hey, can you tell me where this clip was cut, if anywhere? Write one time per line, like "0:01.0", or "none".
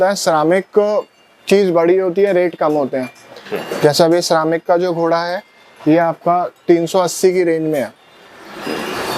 none